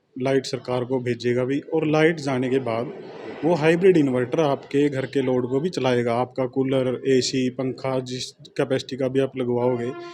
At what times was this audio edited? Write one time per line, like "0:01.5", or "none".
none